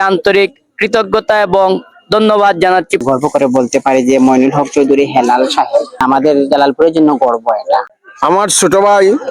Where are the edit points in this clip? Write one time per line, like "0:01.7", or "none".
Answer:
0:03.0
0:06.0
0:07.9